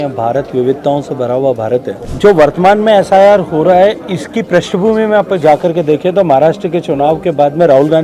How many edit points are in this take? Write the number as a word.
one